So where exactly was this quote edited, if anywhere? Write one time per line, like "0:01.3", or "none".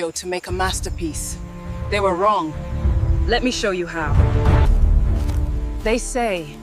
0:04.6